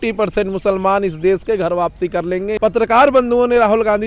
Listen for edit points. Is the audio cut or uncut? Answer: cut